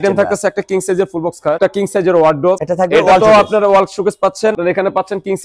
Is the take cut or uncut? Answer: cut